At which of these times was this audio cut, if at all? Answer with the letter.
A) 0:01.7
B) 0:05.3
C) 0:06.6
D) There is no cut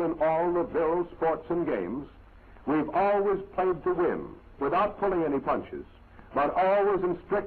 B